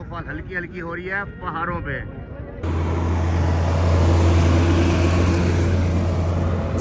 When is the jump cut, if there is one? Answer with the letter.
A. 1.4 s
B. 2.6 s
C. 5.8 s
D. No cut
B